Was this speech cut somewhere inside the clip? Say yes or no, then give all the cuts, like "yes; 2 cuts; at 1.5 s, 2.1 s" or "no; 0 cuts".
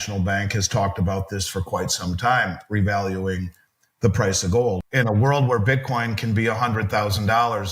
yes; 1 cut; at 4.8 s